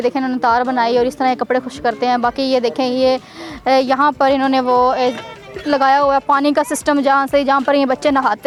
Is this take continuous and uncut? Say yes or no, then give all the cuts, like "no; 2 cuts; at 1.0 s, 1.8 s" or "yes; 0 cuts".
yes; 0 cuts